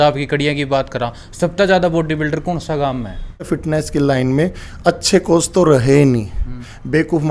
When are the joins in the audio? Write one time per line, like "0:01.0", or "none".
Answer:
0:03.5